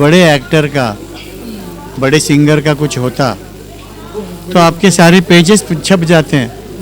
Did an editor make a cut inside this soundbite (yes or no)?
no